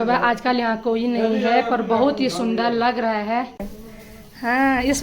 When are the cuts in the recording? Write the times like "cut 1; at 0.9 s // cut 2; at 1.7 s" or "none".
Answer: cut 1; at 3.8 s